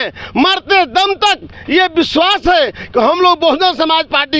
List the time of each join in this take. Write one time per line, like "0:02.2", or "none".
none